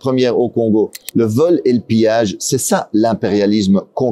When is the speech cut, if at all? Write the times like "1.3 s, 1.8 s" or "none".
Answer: 1.0 s